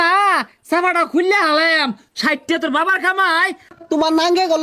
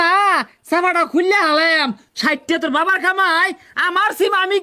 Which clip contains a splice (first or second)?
first